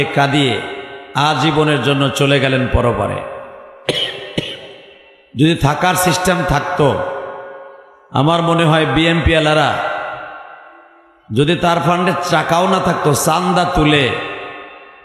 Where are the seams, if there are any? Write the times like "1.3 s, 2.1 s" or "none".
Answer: none